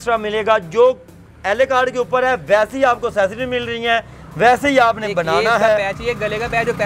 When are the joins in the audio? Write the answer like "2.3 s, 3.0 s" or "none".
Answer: none